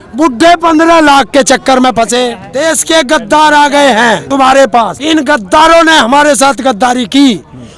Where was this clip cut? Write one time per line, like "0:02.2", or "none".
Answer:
0:02.4
0:04.2
0:05.0